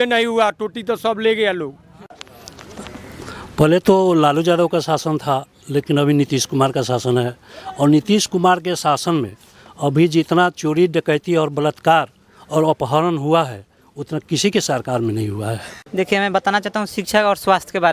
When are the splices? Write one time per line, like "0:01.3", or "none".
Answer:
0:02.3
0:15.7